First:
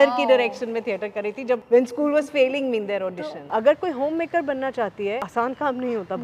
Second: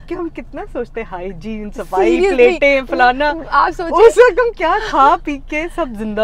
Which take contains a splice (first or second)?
first